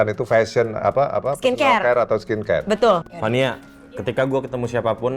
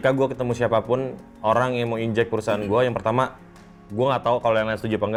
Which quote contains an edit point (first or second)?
first